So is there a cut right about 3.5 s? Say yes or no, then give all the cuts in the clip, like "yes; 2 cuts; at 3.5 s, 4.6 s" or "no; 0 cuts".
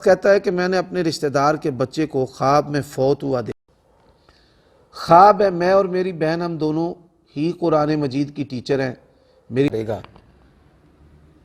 yes; 2 cuts; at 3.5 s, 9.7 s